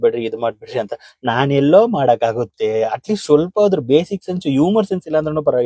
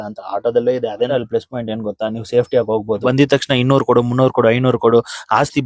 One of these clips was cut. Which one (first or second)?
second